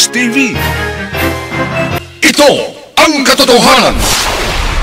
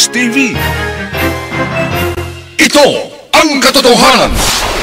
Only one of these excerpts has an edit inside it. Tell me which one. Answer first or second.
first